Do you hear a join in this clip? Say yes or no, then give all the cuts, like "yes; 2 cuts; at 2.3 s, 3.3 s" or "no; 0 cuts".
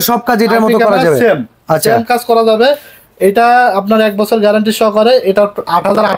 no; 0 cuts